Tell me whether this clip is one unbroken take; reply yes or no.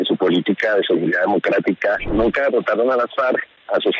no